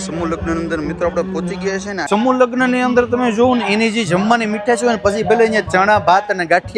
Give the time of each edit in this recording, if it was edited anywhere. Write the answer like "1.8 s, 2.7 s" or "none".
2.0 s